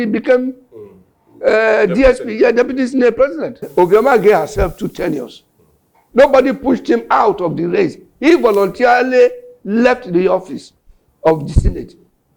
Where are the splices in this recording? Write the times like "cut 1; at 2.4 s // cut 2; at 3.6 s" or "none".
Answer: cut 1; at 3.6 s